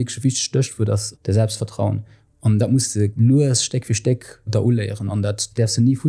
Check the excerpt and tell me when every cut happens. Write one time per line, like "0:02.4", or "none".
0:01.1
0:03.1
0:05.3